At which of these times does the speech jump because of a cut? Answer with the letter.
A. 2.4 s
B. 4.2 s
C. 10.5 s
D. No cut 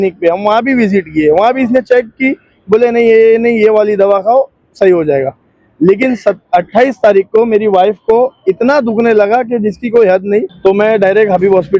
C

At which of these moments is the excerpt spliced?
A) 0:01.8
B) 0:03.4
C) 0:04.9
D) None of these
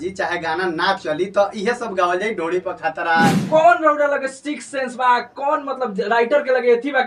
B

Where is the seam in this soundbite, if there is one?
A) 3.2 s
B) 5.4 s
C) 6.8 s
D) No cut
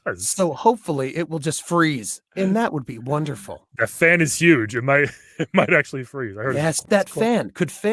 C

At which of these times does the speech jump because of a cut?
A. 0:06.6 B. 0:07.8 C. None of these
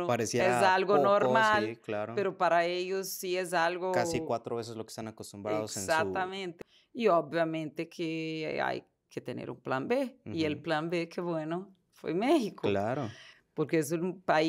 A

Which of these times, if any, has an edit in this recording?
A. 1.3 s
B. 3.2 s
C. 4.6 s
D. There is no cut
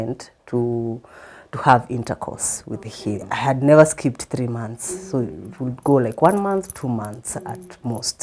B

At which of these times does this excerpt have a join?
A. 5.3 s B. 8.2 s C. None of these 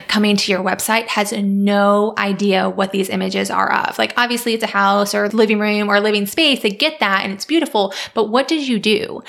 A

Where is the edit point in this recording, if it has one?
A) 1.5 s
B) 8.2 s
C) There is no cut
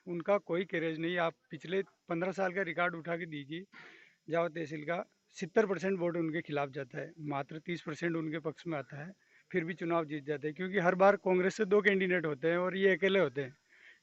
C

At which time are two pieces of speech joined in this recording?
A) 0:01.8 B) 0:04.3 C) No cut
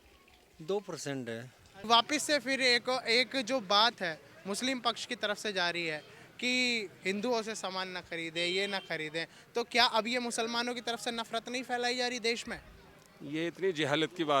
A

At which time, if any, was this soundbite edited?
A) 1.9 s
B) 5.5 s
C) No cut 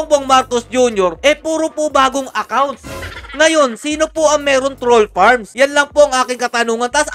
C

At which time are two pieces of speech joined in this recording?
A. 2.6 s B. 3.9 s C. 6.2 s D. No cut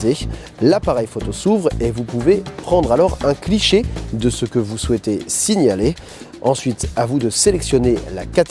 D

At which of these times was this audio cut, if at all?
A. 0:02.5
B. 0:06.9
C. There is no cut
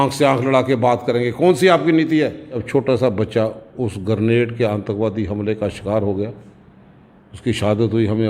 A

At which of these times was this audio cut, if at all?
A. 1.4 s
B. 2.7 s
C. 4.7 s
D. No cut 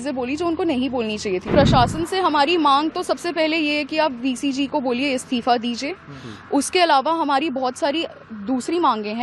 A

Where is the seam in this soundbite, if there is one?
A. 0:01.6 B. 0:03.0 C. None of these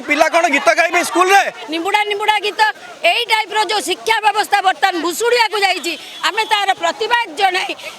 A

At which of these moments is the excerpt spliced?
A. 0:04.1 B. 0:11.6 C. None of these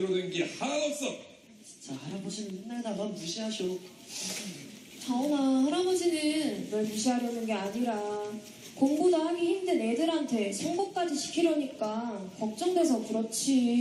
C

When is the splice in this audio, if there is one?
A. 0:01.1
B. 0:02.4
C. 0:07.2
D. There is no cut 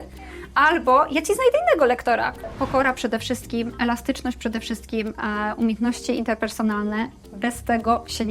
B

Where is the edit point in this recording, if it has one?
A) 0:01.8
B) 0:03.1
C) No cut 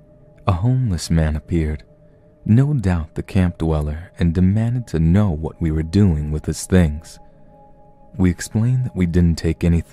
B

